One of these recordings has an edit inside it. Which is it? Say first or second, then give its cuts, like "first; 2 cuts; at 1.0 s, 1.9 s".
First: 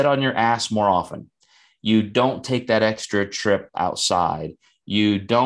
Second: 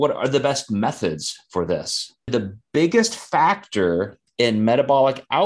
second; 1 cut; at 2.3 s